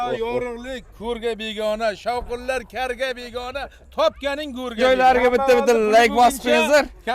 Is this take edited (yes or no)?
yes